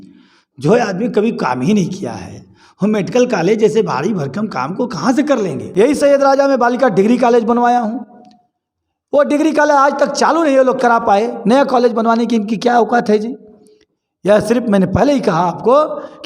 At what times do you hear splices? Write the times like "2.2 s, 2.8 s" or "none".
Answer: 5.6 s